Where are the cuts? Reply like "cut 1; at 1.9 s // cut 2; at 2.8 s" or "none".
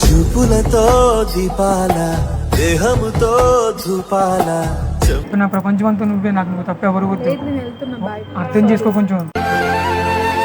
cut 1; at 5.2 s